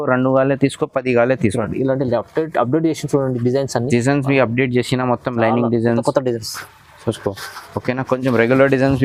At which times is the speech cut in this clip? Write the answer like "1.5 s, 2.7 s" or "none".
none